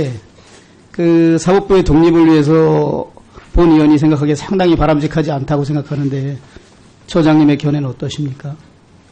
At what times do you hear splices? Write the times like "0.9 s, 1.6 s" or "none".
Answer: none

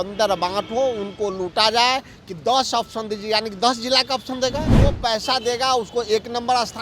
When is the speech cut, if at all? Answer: 5.0 s

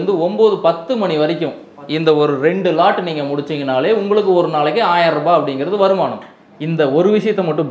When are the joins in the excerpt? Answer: 6.3 s

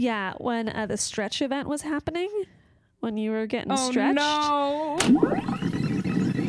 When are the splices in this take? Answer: 5.0 s

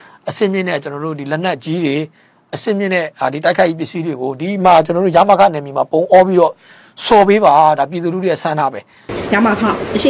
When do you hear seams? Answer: 9.1 s

